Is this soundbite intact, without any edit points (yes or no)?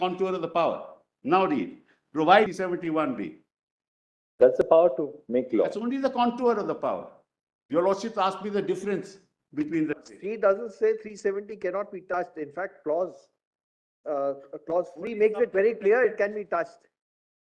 no